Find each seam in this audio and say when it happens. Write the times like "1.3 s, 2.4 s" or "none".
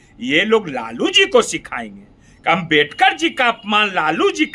none